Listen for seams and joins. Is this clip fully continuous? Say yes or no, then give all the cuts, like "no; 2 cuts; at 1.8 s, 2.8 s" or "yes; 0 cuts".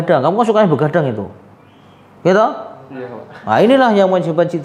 yes; 0 cuts